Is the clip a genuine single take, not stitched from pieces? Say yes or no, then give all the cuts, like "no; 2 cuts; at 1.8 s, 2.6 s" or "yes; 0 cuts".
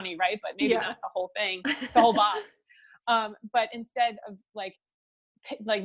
yes; 0 cuts